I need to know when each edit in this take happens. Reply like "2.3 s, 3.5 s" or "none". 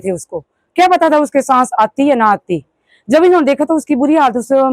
none